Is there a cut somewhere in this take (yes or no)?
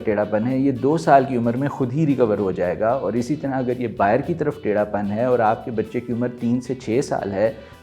no